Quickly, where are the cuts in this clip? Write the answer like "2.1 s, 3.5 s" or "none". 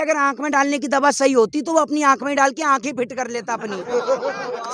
none